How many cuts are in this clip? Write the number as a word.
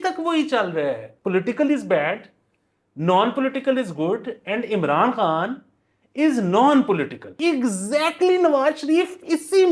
two